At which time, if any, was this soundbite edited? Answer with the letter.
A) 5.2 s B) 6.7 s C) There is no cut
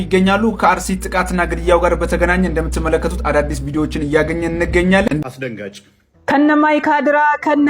A